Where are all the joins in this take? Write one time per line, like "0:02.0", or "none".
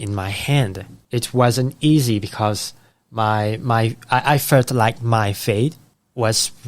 0:00.9